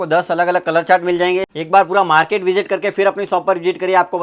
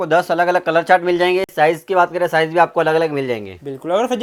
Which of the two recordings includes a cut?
first; 1 cut; at 1.5 s

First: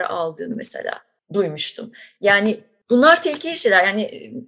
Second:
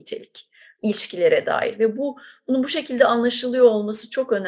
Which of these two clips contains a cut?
first; 2 cuts; at 1.1 s, 2.7 s

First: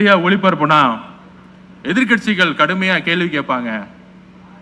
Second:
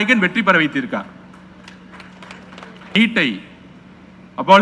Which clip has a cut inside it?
second; 1 cut; at 2.9 s

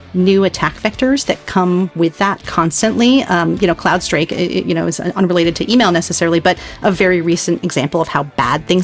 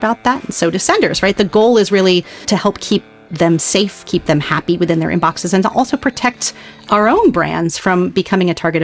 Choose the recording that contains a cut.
second; 1 cut; at 2.4 s

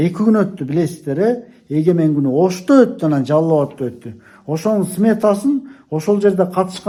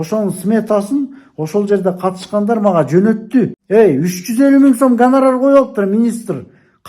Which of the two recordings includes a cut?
second; 1 cut; at 3.6 s

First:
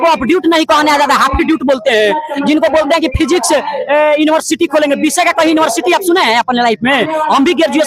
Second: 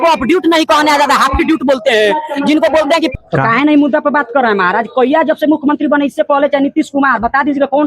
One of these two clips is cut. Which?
second; 1 cut; at 3.1 s

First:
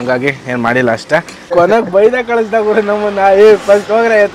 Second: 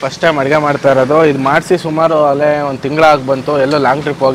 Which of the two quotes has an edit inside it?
first; 1 cut; at 1.5 s

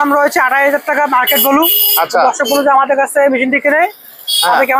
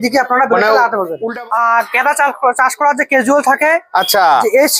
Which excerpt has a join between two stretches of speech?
second; 1 cut; at 1.2 s

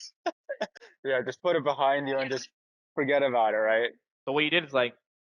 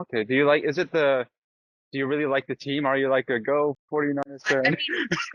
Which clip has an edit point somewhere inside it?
first; 1 cut; at 4.1 s

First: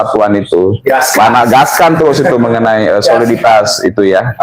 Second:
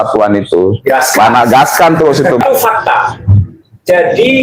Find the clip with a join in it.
second; 1 cut; at 2.5 s

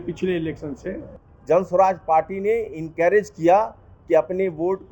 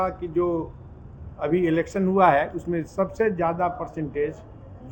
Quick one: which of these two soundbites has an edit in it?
first; 1 cut; at 1.1 s

